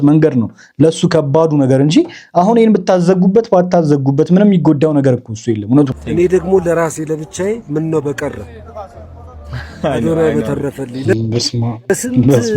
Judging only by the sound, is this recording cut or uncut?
cut